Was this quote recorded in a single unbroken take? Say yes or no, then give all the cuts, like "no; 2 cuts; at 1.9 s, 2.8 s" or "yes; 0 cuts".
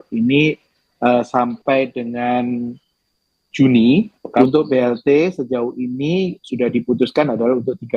no; 1 cut; at 4.4 s